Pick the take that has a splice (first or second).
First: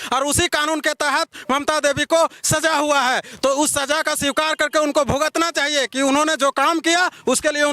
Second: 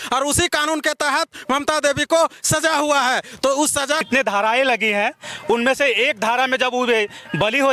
second